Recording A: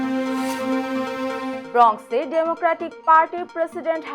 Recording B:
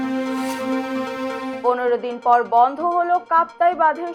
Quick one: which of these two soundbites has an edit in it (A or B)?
B